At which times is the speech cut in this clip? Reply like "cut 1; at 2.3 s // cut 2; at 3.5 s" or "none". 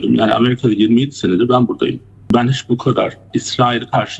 cut 1; at 2.3 s // cut 2; at 3.2 s

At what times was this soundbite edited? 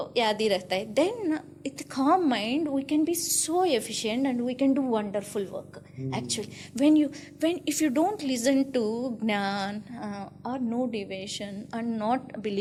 none

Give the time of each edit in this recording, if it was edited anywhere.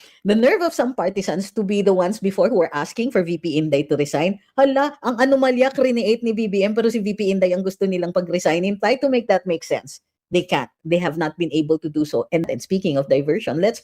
cut 1; at 12.5 s

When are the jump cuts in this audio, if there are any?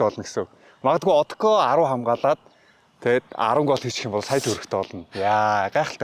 none

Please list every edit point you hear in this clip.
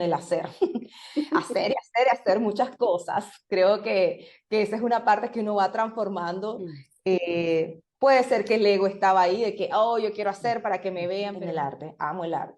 cut 1; at 11.4 s

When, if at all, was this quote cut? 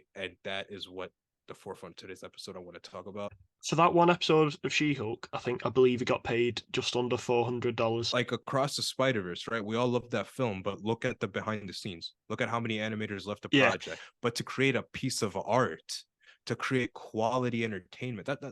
cut 1; at 3.4 s // cut 2; at 8.1 s // cut 3; at 14.0 s

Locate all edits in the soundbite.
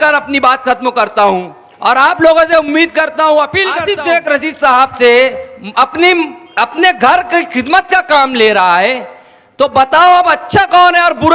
cut 1; at 3.8 s

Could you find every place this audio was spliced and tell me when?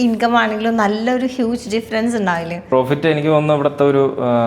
cut 1; at 2.6 s

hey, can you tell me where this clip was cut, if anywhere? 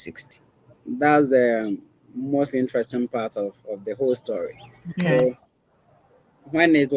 cut 1; at 5.1 s

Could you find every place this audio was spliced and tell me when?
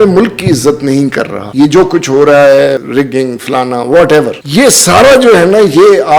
cut 1; at 1.4 s // cut 2; at 2.8 s // cut 3; at 4.4 s

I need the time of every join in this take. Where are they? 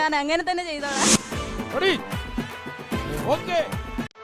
cut 1; at 1.1 s

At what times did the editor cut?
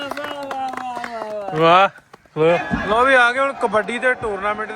cut 1; at 2.6 s

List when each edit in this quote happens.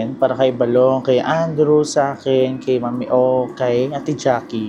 none

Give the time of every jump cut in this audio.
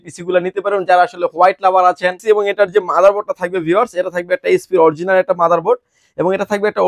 cut 1; at 2.2 s

